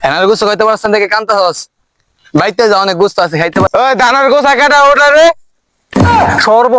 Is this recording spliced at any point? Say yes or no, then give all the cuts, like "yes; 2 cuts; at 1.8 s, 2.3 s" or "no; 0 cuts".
yes; 1 cut; at 3.7 s